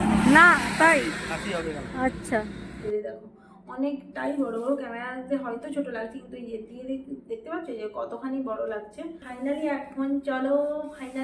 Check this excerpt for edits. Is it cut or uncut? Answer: cut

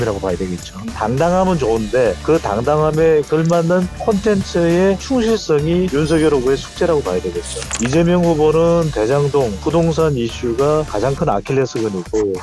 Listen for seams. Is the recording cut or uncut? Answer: cut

